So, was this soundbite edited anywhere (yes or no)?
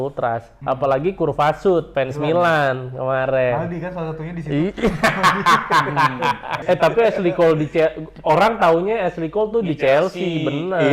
yes